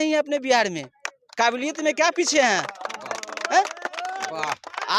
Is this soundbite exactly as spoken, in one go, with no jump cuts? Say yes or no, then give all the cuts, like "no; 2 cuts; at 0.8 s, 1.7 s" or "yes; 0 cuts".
yes; 0 cuts